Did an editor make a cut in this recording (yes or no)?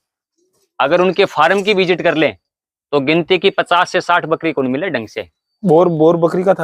no